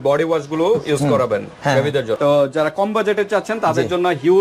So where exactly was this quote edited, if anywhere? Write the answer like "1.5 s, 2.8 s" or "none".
2.2 s